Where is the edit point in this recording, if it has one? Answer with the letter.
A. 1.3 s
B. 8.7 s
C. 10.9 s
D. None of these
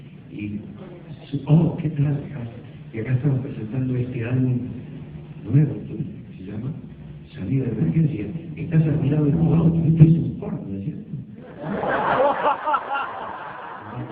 D